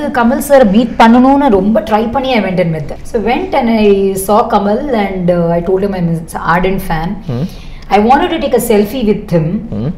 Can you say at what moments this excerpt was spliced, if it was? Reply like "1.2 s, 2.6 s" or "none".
none